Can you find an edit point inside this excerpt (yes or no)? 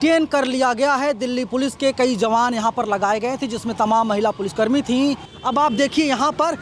yes